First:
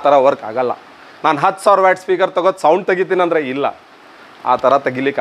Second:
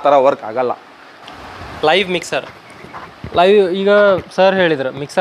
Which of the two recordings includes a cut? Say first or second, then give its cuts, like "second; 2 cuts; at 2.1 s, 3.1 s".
second; 1 cut; at 1.1 s